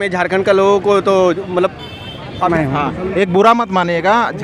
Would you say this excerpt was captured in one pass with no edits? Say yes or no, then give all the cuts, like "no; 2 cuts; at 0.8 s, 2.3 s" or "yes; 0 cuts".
no; 1 cut; at 2.5 s